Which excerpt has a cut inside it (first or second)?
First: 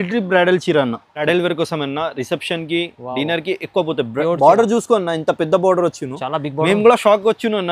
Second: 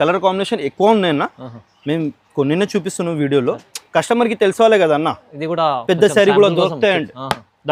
first